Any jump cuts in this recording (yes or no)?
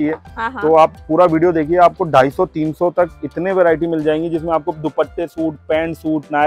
no